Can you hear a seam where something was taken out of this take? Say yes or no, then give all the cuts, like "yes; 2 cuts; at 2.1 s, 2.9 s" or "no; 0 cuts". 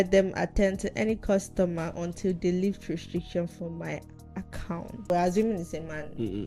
yes; 1 cut; at 5.1 s